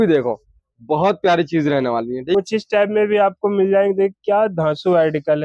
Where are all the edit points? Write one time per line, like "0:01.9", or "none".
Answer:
0:02.3